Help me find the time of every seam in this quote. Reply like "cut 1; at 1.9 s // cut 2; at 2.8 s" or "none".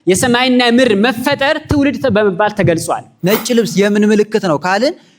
cut 1; at 3.1 s